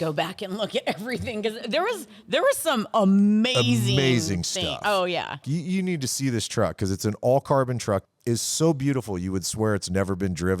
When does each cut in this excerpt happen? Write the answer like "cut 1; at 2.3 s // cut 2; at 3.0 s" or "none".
cut 1; at 5.5 s // cut 2; at 8.1 s